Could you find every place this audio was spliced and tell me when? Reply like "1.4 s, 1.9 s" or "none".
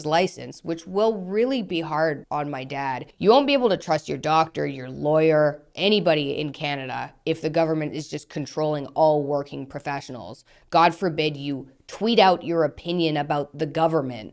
none